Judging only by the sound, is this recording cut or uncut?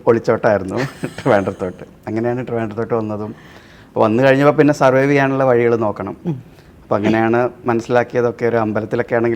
uncut